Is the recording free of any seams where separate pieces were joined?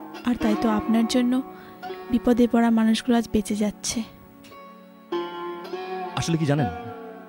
yes; 0 cuts

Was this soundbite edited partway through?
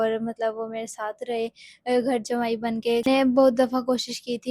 yes; 1 cut; at 3.1 s

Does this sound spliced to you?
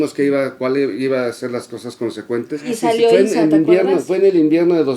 yes; 1 cut; at 2.6 s

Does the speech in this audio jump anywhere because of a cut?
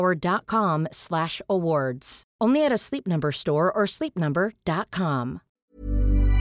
yes; 1 cut; at 5.5 s

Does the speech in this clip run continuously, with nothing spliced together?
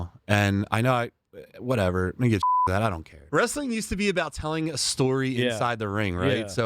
no; 1 cut; at 3.3 s

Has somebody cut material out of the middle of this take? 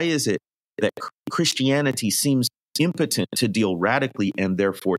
yes; 2 cuts; at 1.0 s, 2.6 s

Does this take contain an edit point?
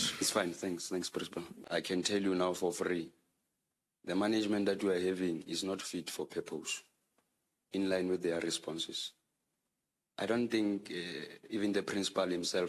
yes; 1 cut; at 1.5 s

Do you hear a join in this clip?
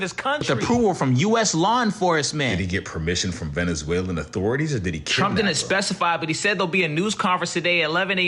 no; 0 cuts

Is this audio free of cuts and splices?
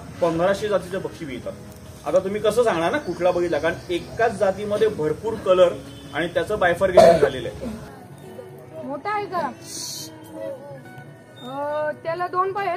no; 1 cut; at 7.8 s

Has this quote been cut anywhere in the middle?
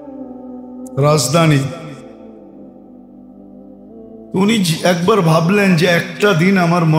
yes; 1 cut; at 0.9 s

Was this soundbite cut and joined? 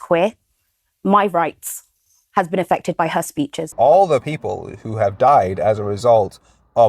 yes; 1 cut; at 3.6 s

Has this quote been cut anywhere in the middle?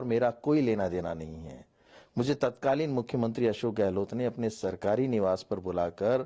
no; 0 cuts

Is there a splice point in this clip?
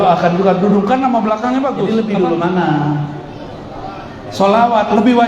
yes; 1 cut; at 1.9 s

